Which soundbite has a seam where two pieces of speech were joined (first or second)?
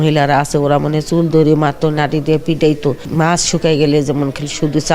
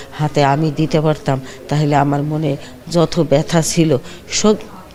first